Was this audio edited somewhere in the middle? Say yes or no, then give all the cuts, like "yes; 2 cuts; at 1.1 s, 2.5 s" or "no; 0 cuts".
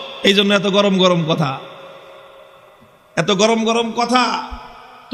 no; 0 cuts